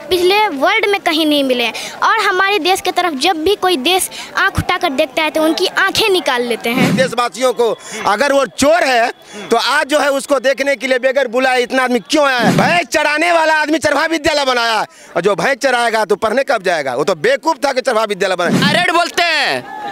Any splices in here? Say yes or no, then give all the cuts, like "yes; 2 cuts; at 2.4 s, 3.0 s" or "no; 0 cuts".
yes; 3 cuts; at 6.9 s, 12.5 s, 18.7 s